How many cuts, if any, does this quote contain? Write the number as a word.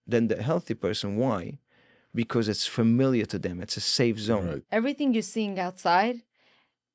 one